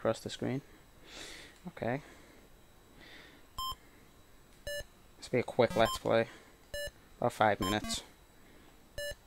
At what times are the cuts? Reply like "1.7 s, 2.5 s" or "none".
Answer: 2.8 s